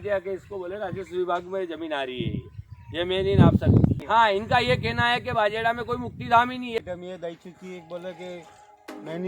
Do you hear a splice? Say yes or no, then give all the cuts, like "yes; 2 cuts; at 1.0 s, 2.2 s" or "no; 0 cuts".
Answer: yes; 2 cuts; at 4.0 s, 6.8 s